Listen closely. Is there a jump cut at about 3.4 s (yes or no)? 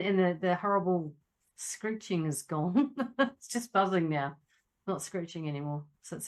no